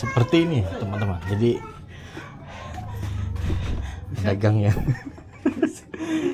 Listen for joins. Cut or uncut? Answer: uncut